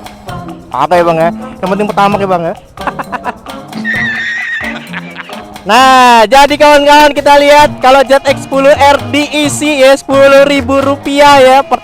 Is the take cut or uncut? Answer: uncut